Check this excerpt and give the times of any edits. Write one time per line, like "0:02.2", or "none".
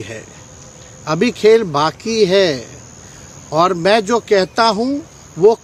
none